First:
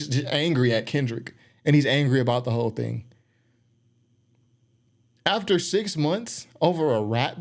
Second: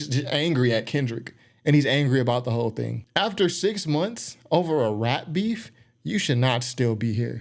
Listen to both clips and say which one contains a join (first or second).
second